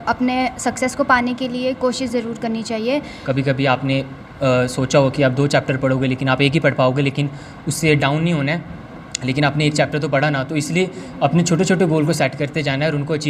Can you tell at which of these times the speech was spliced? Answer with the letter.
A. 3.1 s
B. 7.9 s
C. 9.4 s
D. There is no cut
A